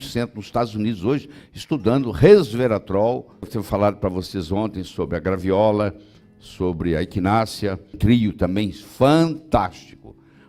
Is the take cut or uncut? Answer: cut